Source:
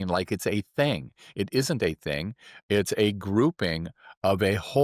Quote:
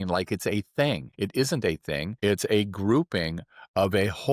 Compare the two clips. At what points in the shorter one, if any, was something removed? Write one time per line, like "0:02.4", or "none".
0:01.1
0:02.1